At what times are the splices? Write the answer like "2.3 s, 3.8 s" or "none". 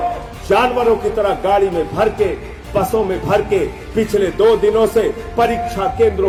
none

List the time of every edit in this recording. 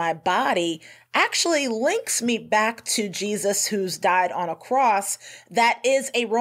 none

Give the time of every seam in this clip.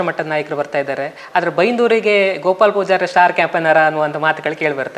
none

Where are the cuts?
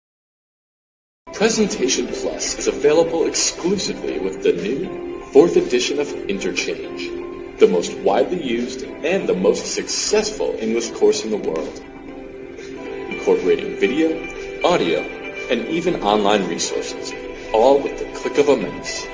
none

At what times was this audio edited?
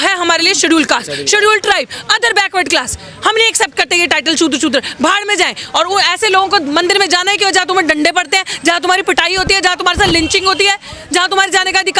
none

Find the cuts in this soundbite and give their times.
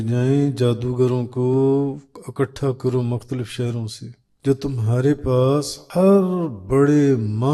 4.2 s, 5.8 s

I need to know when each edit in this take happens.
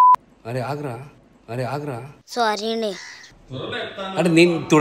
none

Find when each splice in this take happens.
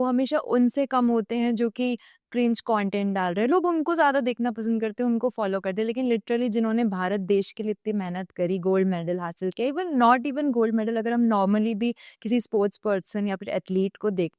none

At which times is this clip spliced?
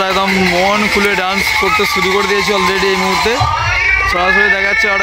none

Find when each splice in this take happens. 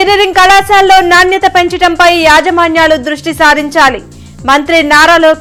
none

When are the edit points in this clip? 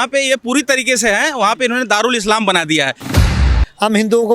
3.4 s

